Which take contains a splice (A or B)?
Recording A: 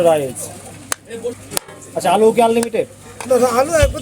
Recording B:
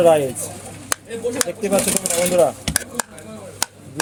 A